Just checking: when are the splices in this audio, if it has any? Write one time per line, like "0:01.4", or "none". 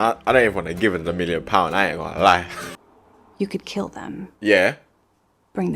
0:02.6